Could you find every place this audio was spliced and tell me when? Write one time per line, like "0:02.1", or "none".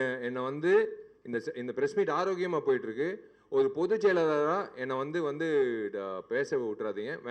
none